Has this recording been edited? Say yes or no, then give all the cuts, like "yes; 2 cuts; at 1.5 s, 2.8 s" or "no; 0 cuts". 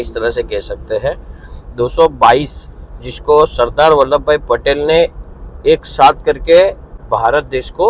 yes; 1 cut; at 6.9 s